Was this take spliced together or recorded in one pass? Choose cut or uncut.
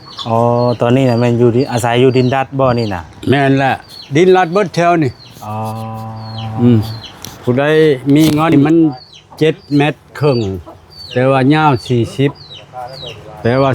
cut